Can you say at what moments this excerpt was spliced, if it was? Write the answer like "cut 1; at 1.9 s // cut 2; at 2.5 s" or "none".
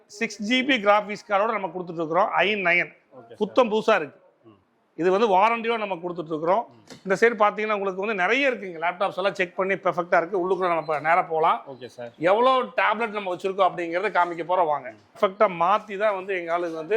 cut 1; at 15.1 s